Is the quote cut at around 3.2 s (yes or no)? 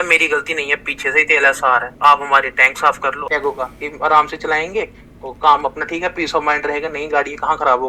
yes